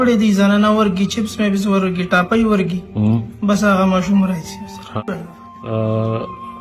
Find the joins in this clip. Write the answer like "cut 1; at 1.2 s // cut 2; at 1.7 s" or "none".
cut 1; at 4.9 s